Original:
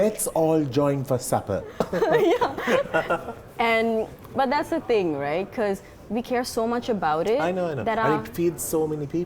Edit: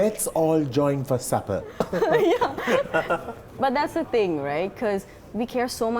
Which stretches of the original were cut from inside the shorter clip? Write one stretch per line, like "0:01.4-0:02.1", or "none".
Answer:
0:03.4-0:04.2